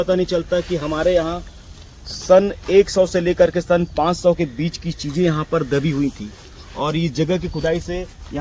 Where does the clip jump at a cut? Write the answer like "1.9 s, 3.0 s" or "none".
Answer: none